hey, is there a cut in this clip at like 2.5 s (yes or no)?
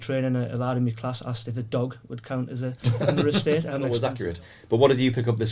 no